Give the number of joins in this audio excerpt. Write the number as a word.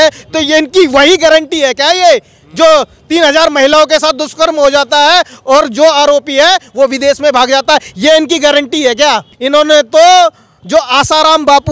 one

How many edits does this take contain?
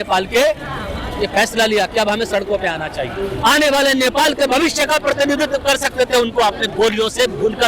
one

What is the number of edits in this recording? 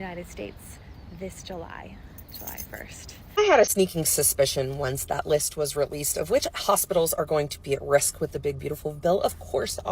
one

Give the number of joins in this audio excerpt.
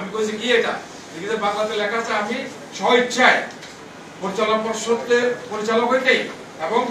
zero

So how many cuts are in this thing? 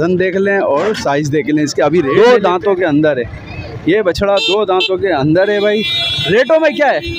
one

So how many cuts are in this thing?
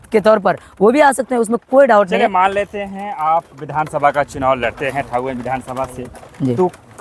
zero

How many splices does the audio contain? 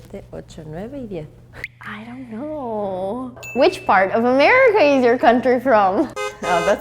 one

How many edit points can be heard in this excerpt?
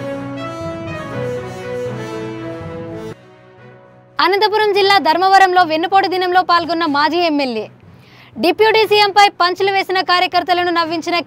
one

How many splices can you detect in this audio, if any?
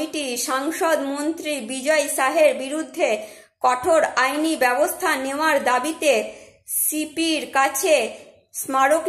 zero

